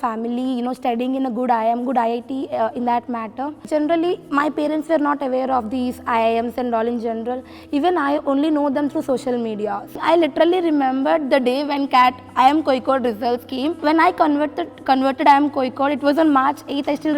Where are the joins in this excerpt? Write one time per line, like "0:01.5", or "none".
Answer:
0:03.7
0:09.9
0:13.8